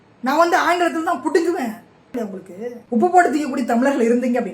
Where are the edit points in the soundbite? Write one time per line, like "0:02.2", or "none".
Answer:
0:02.1